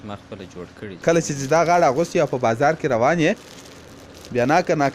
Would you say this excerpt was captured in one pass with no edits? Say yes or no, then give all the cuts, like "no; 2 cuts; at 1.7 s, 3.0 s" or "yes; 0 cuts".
no; 1 cut; at 1.0 s